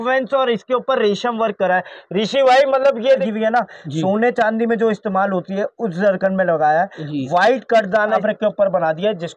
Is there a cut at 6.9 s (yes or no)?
no